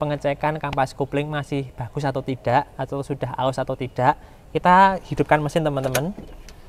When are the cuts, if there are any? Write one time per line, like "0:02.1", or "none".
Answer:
none